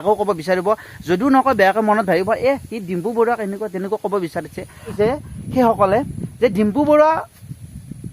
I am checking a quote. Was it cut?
yes; 1 cut; at 5.0 s

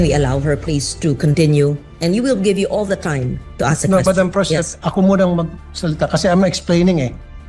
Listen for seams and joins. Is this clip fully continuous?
yes; 0 cuts

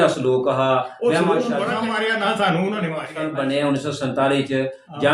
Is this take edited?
yes; 2 cuts; at 1.8 s, 3.2 s

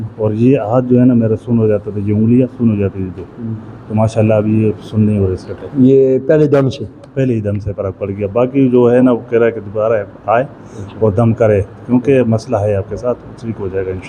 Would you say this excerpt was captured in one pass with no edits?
yes; 0 cuts

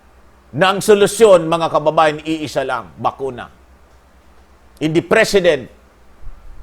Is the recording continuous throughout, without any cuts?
yes; 0 cuts

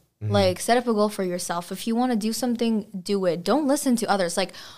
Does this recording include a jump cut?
no; 0 cuts

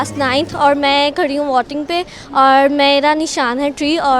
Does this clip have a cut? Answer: no; 0 cuts

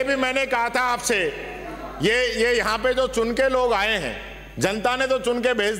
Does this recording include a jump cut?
no; 0 cuts

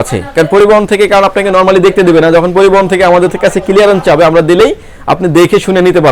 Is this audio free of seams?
yes; 0 cuts

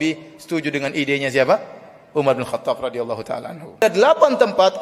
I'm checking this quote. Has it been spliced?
yes; 1 cut; at 3.8 s

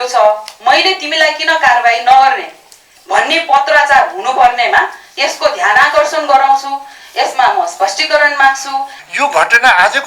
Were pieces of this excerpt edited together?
yes; 1 cut; at 9.0 s

